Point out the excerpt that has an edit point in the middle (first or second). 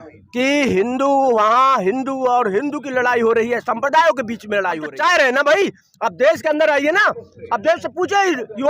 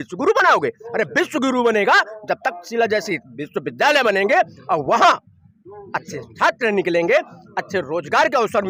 first